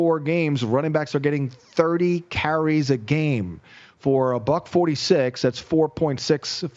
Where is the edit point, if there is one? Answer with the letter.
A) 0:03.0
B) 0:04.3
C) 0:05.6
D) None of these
D